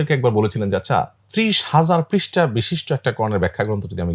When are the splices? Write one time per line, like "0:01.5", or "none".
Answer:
none